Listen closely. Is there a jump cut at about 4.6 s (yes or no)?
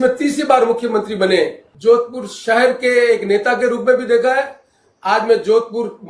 no